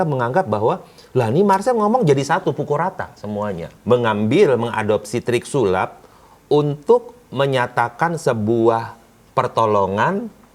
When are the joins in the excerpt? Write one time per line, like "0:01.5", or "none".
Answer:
0:03.7